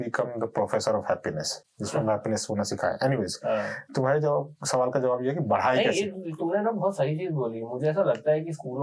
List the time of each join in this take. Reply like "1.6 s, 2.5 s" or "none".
none